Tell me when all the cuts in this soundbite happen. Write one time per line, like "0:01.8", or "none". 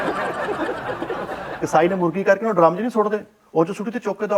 0:01.6